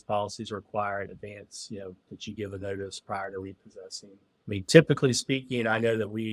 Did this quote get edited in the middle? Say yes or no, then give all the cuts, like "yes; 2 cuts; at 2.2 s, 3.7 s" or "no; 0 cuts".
no; 0 cuts